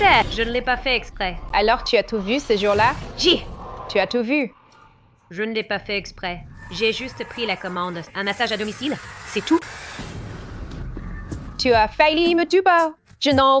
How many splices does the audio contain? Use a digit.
0